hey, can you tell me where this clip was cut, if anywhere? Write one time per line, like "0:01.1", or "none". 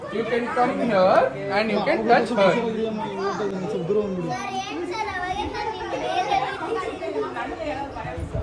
none